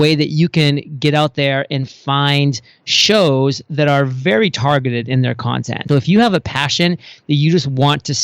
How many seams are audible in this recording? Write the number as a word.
one